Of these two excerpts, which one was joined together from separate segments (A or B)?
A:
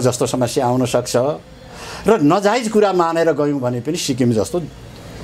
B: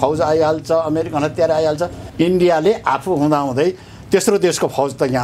B